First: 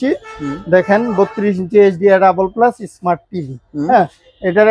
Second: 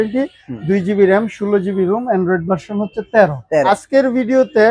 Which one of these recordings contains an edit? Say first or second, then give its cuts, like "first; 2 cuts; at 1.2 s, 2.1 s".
second; 1 cut; at 3.7 s